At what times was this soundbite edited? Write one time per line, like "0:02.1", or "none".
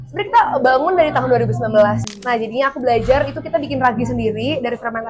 0:02.0